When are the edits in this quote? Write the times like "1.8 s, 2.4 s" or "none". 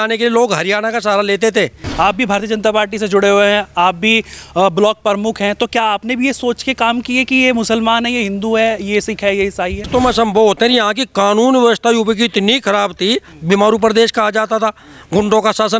1.8 s, 9.9 s